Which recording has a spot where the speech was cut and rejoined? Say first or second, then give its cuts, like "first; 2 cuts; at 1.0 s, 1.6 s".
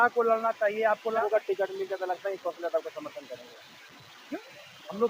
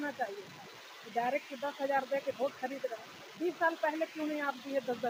first; 1 cut; at 1.1 s